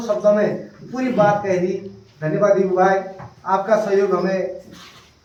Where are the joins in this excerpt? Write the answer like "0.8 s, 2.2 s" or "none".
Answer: none